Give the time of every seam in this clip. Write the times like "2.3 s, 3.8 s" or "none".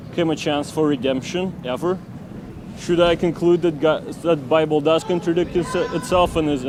none